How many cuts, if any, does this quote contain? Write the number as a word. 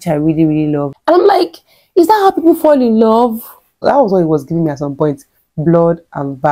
two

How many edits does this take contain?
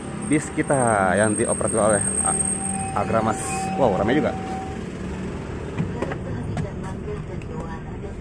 zero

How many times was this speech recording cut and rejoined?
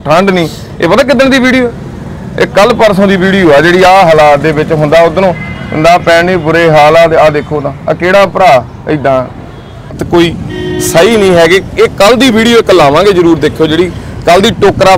one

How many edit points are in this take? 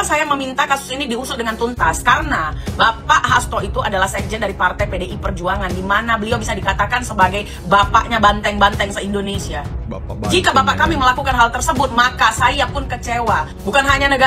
zero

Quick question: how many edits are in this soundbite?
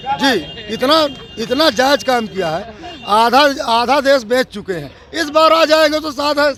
zero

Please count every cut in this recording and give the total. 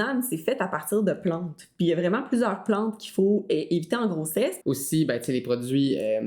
one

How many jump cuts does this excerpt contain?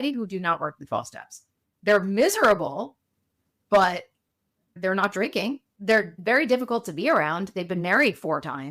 zero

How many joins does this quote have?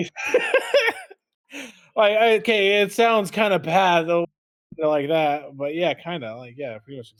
zero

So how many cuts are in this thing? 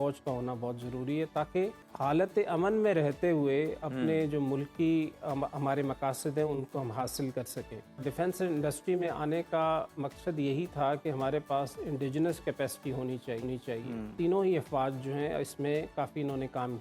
three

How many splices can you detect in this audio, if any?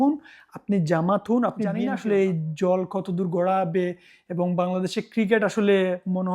one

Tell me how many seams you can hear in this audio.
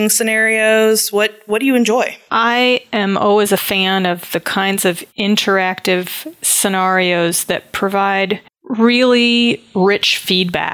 one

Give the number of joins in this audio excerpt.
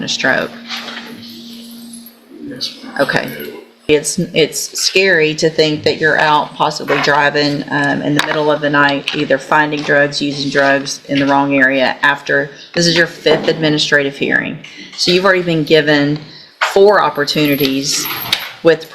one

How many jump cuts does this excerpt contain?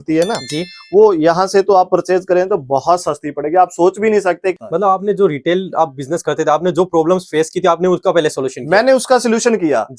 one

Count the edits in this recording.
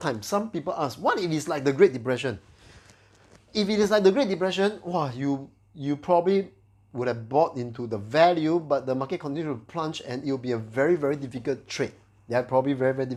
zero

